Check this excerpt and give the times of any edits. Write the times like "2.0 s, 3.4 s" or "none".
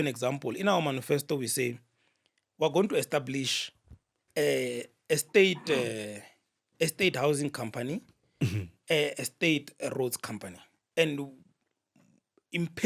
none

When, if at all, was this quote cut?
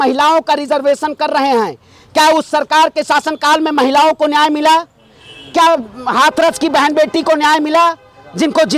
none

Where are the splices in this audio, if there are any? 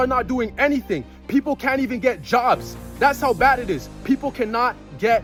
none

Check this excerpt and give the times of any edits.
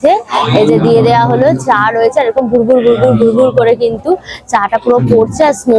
none

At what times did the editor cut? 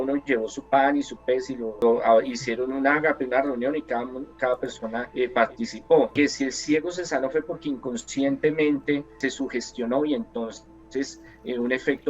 1.7 s, 5.1 s, 6.1 s, 9.1 s

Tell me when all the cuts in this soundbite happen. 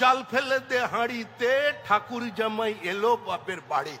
none

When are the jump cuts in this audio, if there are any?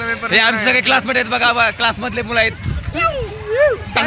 none

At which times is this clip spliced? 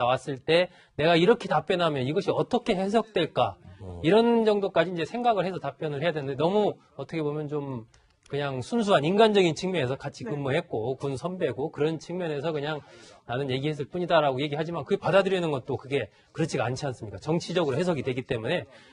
6.9 s

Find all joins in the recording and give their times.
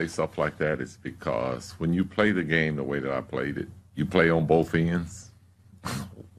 none

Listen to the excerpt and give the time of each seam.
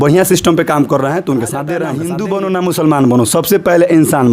2.1 s

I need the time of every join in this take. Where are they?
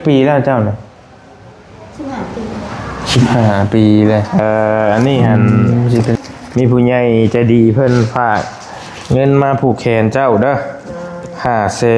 4.3 s

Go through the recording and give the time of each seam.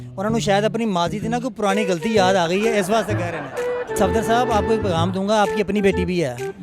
3.9 s

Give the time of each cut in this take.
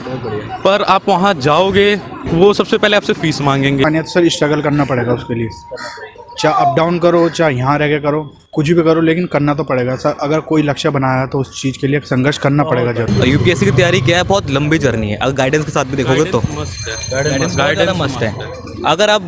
2.2 s, 3.8 s, 13.1 s

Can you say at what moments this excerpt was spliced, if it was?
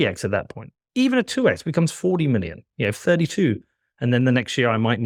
none

